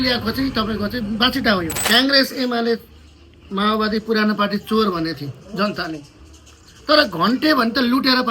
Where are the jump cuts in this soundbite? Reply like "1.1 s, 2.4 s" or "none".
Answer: 1.8 s